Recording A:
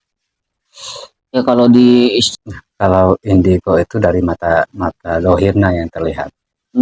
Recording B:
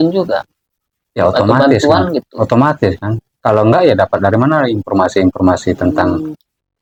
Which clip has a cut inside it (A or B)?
A